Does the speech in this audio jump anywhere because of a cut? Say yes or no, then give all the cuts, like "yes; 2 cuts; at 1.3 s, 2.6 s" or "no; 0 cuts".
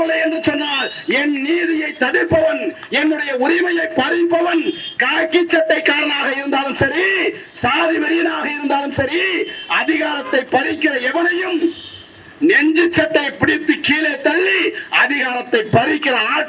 no; 0 cuts